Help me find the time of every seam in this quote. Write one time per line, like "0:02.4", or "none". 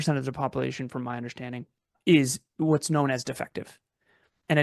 0:02.0